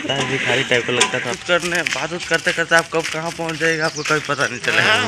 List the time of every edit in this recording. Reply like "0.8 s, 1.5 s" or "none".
1.2 s

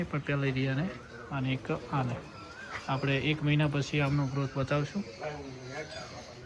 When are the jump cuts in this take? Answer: none

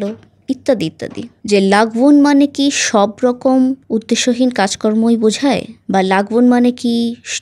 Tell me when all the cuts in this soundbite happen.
1.3 s

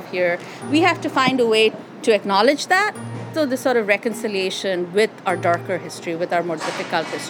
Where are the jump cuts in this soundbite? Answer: 1.9 s, 3.3 s

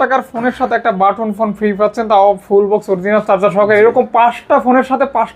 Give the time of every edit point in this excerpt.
none

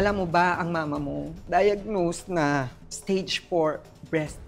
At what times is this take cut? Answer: none

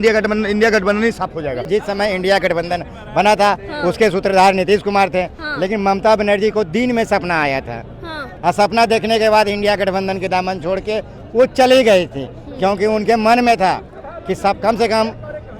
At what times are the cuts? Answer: 1.7 s, 8.3 s

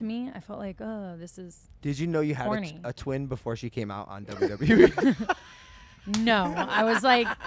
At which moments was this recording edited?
none

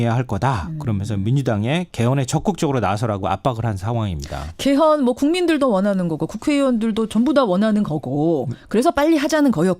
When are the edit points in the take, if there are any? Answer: 5.8 s

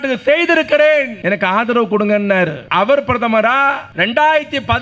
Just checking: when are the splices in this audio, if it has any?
1.1 s, 2.6 s, 3.9 s

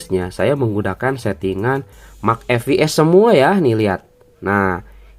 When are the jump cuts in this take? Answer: none

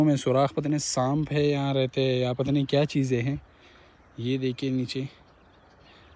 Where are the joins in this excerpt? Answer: none

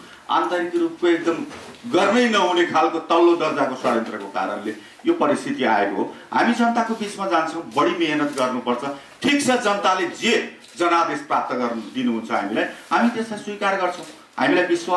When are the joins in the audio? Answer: none

